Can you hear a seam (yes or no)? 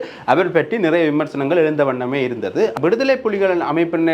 yes